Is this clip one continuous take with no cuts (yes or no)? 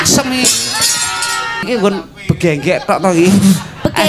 no